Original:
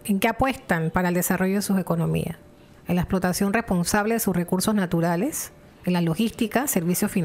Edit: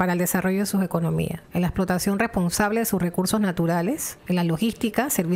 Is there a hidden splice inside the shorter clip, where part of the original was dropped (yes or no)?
yes